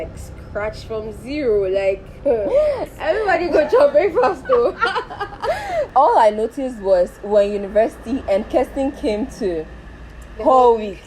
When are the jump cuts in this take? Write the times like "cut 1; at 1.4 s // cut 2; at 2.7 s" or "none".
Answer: cut 1; at 2.9 s // cut 2; at 5.9 s